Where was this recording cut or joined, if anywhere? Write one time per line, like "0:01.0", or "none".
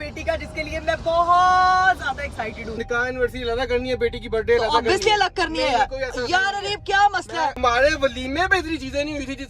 0:02.8
0:07.6